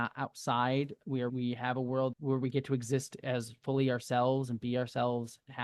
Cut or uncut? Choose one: cut